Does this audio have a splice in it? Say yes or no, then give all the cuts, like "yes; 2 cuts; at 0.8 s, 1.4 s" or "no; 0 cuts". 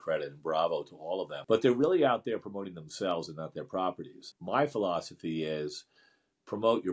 yes; 2 cuts; at 1.4 s, 4.3 s